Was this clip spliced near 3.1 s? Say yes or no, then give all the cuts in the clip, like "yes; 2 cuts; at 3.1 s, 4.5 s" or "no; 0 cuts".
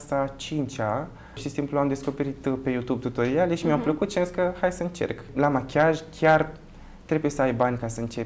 no; 2 cuts; at 1.4 s, 5.3 s